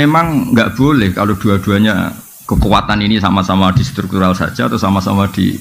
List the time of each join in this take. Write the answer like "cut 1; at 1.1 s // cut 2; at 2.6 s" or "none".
none